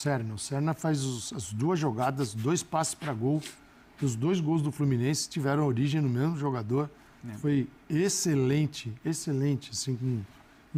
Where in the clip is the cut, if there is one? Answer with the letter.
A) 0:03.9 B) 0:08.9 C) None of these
C